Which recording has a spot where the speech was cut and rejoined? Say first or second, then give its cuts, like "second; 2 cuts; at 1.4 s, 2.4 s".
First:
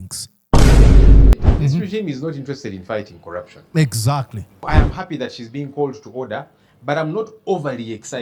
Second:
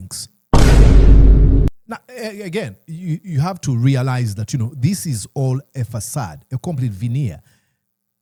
first; 2 cuts; at 1.3 s, 4.6 s